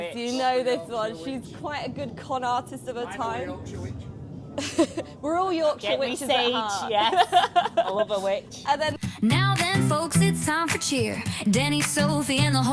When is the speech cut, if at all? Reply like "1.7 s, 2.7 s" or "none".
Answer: 9.0 s